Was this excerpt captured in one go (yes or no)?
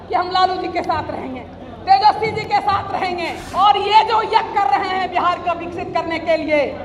no